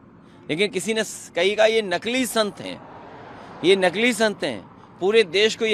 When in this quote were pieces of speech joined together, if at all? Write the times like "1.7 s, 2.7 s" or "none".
none